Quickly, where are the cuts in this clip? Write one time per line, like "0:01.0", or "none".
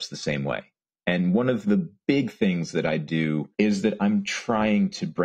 0:01.9
0:03.5